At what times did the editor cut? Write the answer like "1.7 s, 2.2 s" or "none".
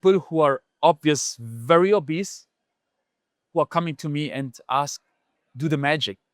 none